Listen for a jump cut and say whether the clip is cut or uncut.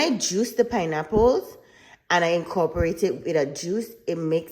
uncut